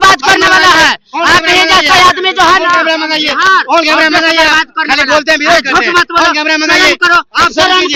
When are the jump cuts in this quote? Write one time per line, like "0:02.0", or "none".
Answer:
none